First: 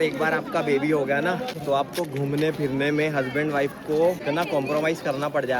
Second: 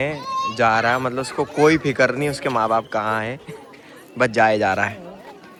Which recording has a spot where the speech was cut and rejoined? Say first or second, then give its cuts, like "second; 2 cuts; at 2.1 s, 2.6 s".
first; 2 cuts; at 1.5 s, 4.2 s